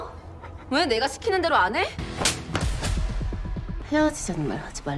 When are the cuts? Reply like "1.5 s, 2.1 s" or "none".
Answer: 2.0 s